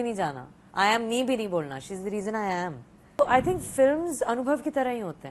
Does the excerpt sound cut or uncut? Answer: cut